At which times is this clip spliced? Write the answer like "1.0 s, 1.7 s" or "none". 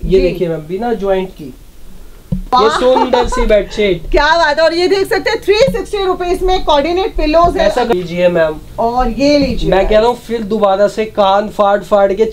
2.4 s, 7.9 s